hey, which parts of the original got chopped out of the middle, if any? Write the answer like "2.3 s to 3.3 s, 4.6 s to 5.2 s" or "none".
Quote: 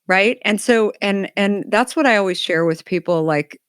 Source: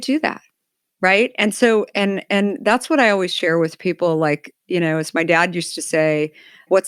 none